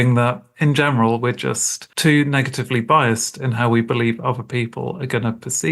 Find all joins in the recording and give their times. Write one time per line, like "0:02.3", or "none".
0:01.8

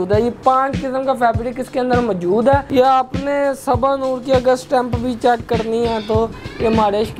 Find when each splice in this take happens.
0:02.7

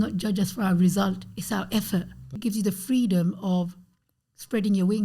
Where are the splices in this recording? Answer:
0:02.3

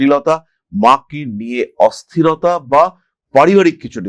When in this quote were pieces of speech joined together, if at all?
none

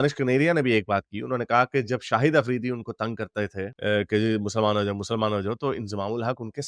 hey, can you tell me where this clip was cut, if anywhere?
none

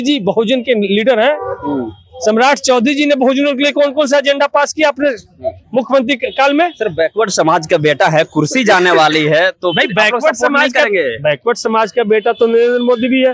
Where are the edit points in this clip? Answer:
none

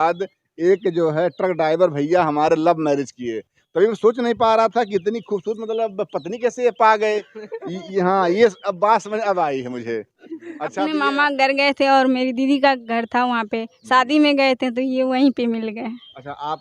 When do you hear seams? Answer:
0:10.7

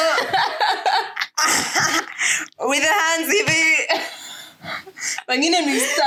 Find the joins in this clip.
none

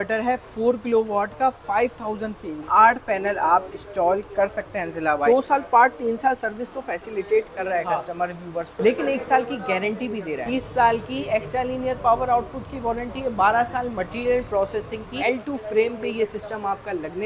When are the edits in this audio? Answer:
0:02.6
0:05.3
0:08.8
0:10.4
0:15.1

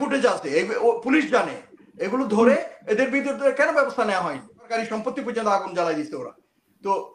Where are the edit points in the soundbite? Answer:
0:04.7

